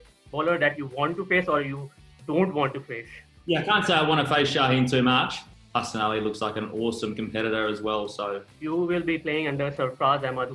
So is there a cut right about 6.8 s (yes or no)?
no